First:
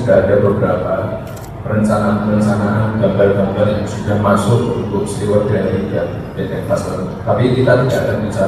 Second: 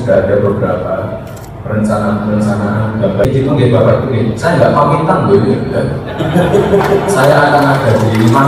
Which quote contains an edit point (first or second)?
second